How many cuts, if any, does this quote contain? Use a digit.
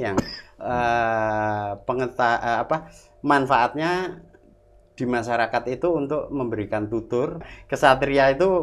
1